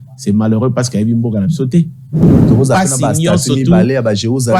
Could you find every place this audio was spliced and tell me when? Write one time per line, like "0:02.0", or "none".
0:02.2